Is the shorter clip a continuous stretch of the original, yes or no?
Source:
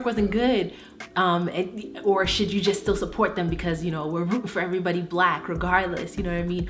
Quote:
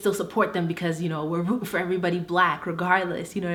yes